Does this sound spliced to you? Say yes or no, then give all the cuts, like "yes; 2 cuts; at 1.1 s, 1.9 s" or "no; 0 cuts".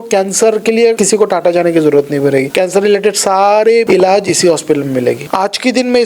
yes; 4 cuts; at 1.0 s, 2.5 s, 3.9 s, 5.2 s